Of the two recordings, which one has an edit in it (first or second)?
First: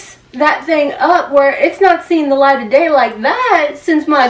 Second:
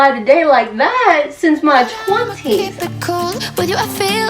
second